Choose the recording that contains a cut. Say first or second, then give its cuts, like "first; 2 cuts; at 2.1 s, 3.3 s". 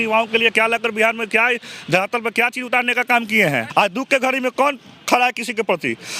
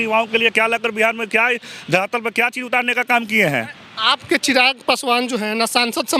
first; 1 cut; at 3.6 s